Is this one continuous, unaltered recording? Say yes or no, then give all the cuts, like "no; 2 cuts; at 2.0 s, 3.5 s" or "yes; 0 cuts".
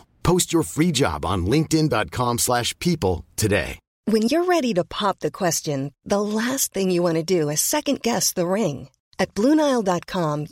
no; 1 cut; at 3.8 s